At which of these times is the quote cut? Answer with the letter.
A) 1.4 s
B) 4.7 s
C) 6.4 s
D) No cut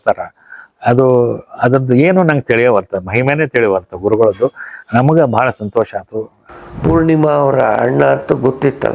C